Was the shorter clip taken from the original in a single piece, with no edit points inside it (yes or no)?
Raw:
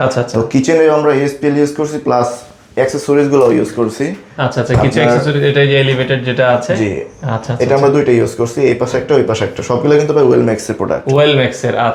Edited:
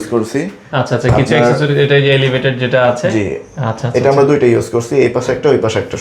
yes